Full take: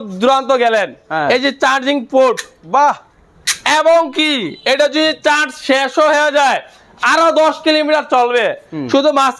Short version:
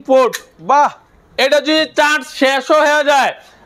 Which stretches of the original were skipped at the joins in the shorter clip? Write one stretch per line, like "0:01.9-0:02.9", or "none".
0:03.3-0:04.5